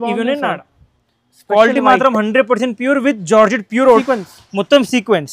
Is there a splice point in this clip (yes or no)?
yes